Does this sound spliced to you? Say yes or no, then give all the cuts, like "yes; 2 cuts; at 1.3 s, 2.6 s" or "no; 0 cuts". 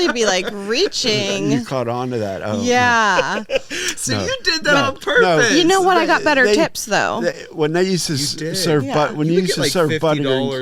no; 0 cuts